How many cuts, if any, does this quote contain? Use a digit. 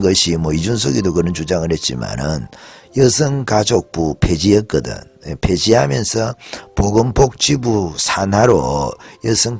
0